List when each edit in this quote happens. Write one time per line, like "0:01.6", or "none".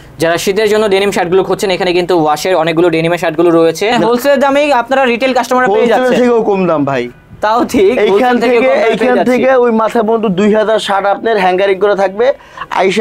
0:03.9